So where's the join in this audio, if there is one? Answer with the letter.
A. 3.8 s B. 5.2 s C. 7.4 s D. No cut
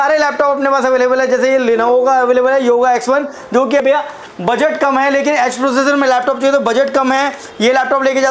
A